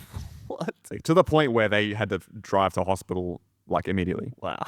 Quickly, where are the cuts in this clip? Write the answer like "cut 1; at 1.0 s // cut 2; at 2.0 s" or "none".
cut 1; at 0.9 s